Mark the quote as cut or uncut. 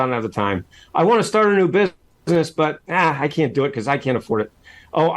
cut